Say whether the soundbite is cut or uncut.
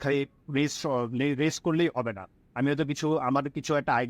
uncut